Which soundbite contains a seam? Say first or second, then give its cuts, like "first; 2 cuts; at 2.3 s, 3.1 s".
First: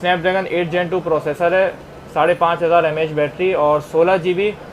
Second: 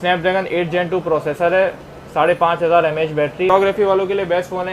second; 1 cut; at 3.5 s